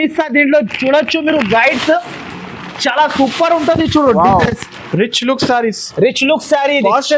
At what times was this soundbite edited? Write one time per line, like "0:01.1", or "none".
none